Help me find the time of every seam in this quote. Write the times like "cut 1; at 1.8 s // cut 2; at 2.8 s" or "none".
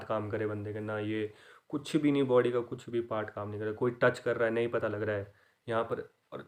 none